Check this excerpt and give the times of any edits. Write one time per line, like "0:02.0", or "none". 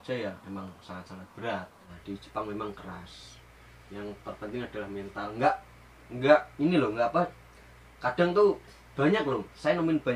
0:01.8